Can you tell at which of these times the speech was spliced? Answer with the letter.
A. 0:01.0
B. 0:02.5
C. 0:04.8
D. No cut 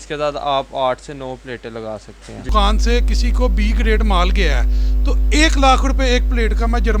B